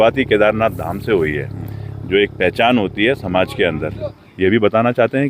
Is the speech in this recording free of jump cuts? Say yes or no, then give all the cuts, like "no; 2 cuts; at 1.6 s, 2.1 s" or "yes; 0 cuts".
no; 1 cut; at 4.2 s